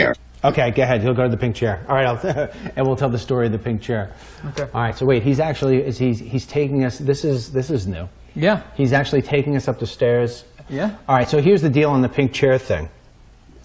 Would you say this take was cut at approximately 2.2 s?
no; 1 cut; at 5.9 s

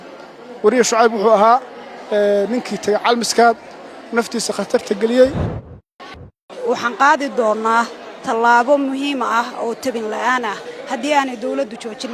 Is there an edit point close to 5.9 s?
yes; 1 cut; at 5.9 s

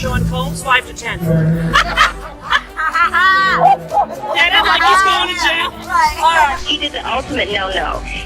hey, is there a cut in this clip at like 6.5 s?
yes; 1 cut; at 6.5 s

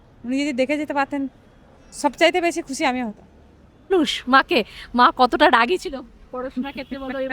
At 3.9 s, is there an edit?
yes; 1 cut; at 3.9 s

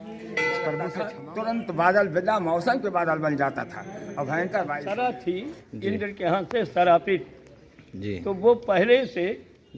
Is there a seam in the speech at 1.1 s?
yes; 2 cuts; at 1.1 s, 4.8 s

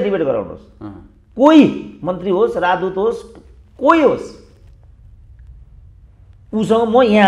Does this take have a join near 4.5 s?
no; 0 cuts

